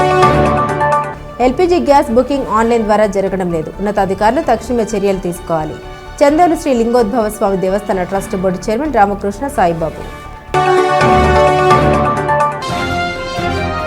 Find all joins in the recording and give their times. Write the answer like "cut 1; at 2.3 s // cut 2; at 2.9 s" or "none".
cut 1; at 1.0 s